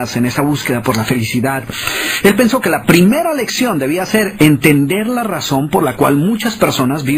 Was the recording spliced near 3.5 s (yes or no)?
no